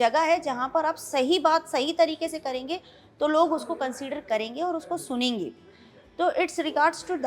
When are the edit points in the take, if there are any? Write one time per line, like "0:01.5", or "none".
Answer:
none